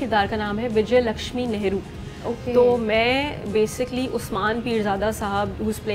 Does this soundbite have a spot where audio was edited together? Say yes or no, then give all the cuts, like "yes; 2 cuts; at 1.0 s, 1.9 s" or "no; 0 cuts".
no; 0 cuts